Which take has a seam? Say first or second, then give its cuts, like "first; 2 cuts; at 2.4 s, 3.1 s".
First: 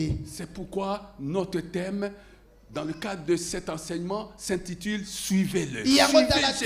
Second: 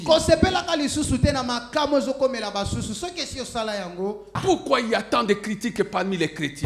second; 1 cut; at 4.4 s